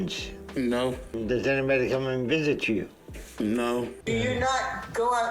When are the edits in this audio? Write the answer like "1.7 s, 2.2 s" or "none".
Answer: 4.0 s